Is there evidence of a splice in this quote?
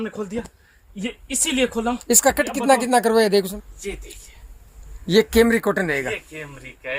yes; 1 cut; at 3.6 s

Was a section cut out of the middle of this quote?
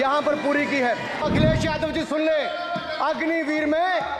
yes; 1 cut; at 1.2 s

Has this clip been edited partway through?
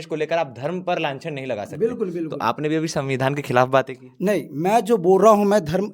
no; 0 cuts

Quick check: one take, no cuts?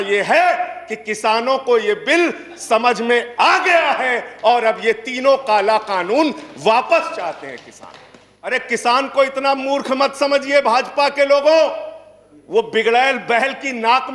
no; 1 cut; at 8.5 s

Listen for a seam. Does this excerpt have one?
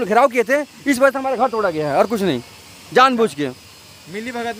no; 0 cuts

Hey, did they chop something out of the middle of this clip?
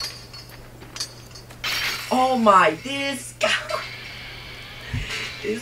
no; 0 cuts

